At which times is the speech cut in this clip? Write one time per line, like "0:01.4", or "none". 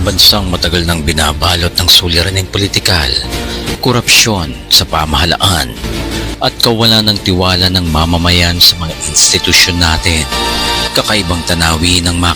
0:05.8